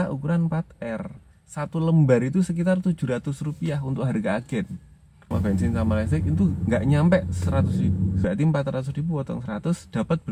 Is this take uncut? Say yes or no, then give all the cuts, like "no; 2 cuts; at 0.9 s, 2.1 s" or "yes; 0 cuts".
no; 3 cuts; at 1.4 s, 5.3 s, 8.2 s